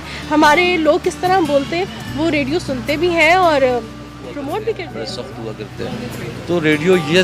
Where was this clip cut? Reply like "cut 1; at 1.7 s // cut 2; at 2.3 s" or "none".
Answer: cut 1; at 5.2 s